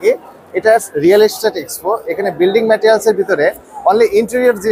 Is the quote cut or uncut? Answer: uncut